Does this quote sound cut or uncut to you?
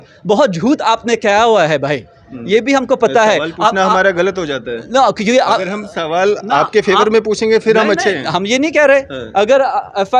uncut